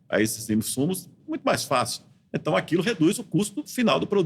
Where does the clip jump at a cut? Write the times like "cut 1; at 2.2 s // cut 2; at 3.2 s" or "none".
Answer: none

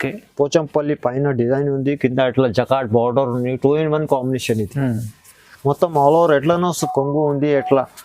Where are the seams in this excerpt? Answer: cut 1; at 6.8 s

